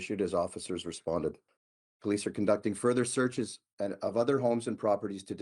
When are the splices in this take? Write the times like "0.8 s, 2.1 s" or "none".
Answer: 1.5 s